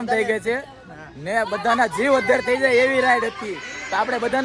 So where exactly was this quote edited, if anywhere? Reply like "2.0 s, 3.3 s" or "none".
none

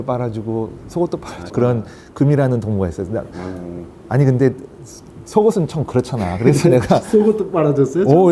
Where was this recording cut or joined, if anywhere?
1.5 s

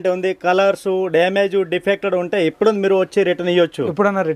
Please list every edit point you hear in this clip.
none

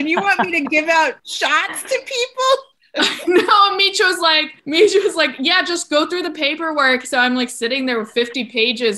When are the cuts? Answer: 4.5 s

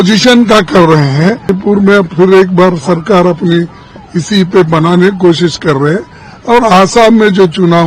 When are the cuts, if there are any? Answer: 1.6 s

